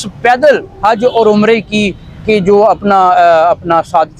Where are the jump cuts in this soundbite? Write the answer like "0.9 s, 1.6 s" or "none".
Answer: none